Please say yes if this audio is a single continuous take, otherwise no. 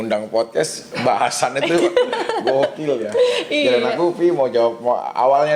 yes